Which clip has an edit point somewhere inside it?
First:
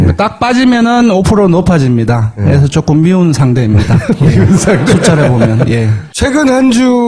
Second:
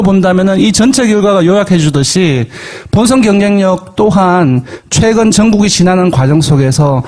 second; 1 cut; at 2.8 s

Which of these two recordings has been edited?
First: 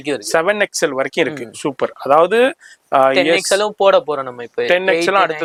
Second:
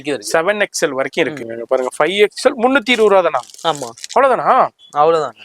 second; 1 cut; at 1.5 s

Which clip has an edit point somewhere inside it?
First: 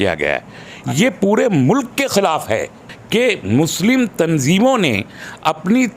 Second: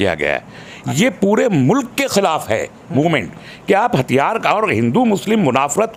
first; 1 cut; at 2.8 s

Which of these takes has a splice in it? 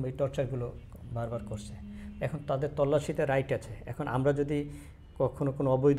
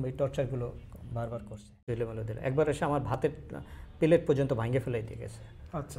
second; 1 cut; at 1.8 s

